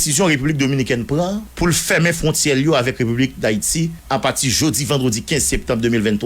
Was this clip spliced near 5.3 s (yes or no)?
no